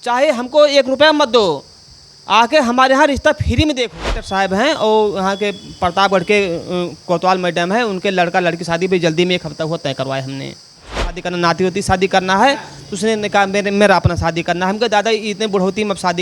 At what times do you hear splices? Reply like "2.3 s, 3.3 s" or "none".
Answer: 4.2 s, 11.2 s